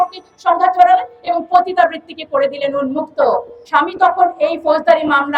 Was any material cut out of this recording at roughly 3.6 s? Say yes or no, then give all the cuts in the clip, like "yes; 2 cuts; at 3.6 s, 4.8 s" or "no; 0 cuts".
yes; 1 cut; at 3.6 s